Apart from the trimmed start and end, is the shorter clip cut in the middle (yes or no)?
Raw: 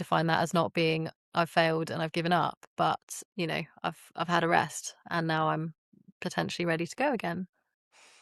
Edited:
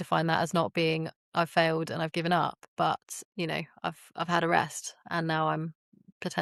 no